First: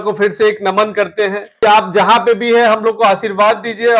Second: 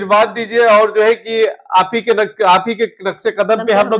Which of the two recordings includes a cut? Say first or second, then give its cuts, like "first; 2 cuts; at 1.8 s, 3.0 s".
first; 1 cut; at 1.6 s